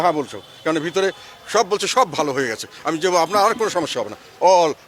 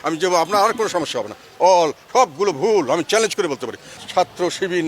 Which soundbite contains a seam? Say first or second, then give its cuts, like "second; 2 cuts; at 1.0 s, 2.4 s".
second; 1 cut; at 3.9 s